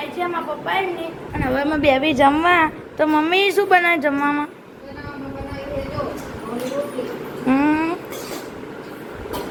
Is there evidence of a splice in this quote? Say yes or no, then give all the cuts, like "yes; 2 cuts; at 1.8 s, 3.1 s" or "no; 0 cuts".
no; 0 cuts